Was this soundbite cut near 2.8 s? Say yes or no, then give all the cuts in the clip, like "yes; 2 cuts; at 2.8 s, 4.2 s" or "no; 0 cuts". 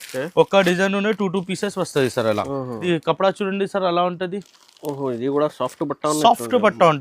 yes; 1 cut; at 2.8 s